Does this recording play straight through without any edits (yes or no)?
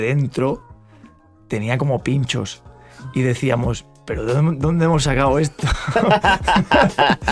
yes